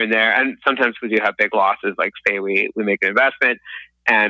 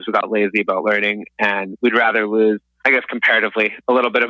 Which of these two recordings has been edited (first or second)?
second